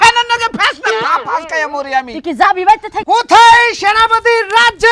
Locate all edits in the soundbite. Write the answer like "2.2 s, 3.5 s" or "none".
2.9 s

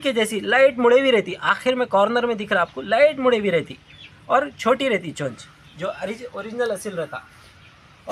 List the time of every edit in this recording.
none

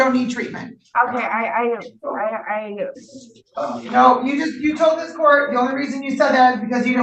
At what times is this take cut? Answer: none

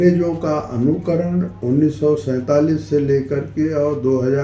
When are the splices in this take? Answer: 1.5 s

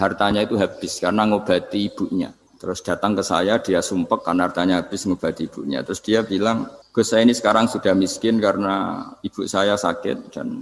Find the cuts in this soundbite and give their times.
2.5 s, 6.8 s

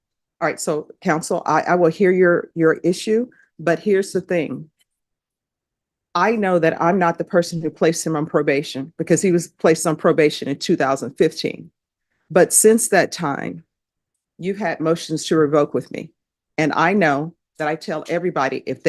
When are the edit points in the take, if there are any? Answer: none

